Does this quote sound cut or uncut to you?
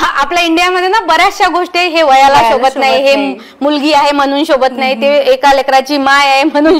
uncut